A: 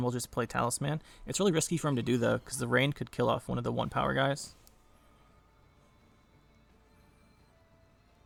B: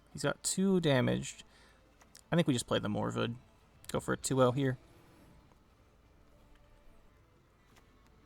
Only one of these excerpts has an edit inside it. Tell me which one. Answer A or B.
B